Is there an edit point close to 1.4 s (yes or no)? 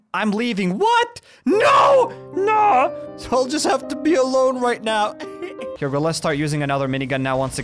no